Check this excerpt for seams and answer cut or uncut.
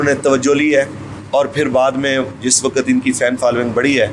uncut